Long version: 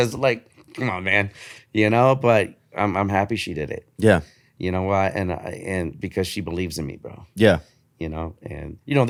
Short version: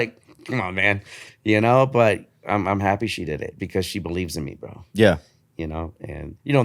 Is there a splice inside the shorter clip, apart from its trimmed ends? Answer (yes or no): yes